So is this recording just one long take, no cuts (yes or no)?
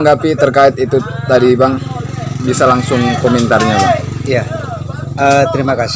yes